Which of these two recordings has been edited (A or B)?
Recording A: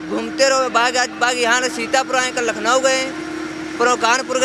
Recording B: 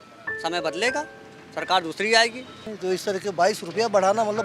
B